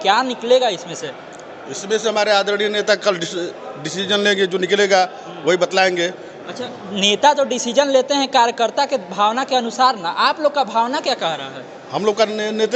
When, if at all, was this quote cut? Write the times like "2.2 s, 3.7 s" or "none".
none